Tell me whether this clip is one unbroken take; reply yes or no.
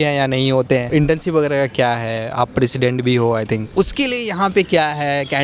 no